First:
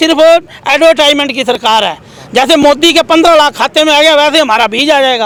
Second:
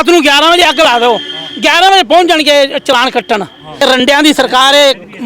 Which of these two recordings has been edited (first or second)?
second